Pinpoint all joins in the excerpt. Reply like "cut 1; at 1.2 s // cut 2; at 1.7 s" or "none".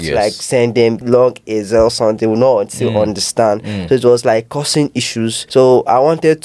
cut 1; at 1.0 s // cut 2; at 5.4 s